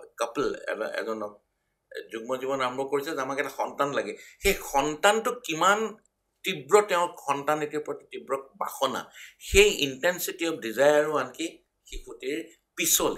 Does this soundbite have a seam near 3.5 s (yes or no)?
no